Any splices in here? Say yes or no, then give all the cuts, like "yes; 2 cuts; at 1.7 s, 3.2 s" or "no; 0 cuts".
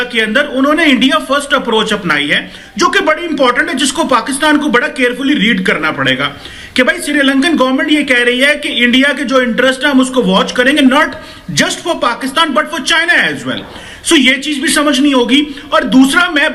no; 0 cuts